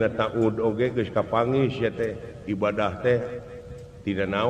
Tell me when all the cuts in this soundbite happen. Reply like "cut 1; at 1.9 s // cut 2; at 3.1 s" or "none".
none